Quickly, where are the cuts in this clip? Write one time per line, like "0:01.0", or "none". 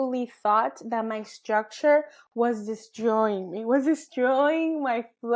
none